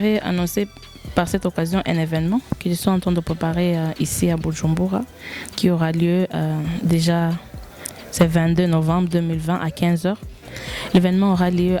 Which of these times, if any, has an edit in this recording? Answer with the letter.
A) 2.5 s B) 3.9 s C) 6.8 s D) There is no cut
D